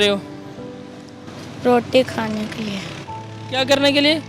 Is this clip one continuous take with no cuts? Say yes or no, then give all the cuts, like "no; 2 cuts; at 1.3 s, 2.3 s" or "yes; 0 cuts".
yes; 0 cuts